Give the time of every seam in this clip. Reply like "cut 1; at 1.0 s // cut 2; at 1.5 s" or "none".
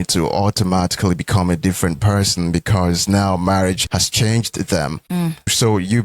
cut 1; at 3.8 s // cut 2; at 5.0 s